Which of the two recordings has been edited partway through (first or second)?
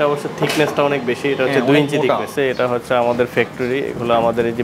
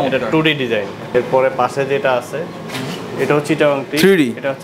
first